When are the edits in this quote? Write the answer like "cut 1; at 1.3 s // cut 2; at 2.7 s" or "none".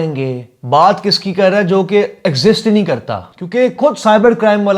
none